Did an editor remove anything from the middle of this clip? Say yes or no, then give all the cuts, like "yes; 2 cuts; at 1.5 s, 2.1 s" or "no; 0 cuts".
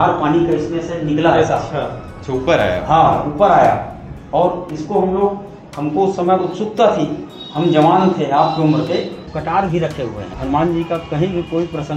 yes; 2 cuts; at 9.2 s, 10.3 s